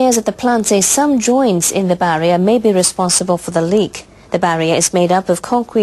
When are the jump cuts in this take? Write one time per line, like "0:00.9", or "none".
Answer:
none